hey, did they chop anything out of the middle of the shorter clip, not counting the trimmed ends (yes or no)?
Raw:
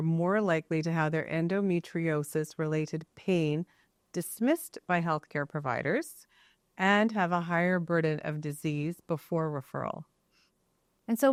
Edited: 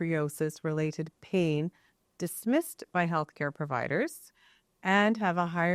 no